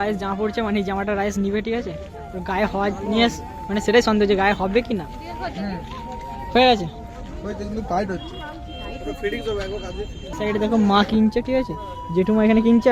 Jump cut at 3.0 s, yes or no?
no